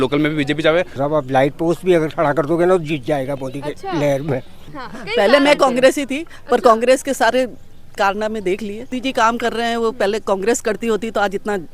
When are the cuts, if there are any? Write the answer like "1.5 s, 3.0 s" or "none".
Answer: 1.0 s, 4.6 s, 8.9 s